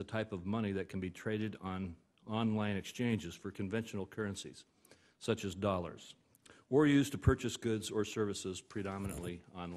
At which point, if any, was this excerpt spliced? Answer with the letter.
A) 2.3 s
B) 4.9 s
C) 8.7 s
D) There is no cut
D